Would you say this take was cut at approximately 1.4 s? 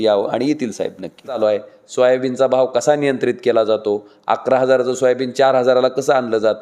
yes; 1 cut; at 1.4 s

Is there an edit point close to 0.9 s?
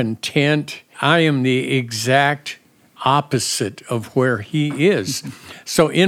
yes; 1 cut; at 0.9 s

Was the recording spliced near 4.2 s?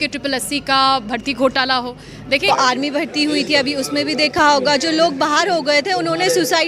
no; 1 cut; at 2.5 s

